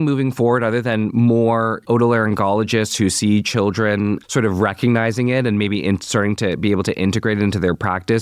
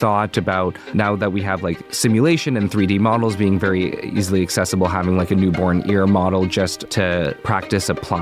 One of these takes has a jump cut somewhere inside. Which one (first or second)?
second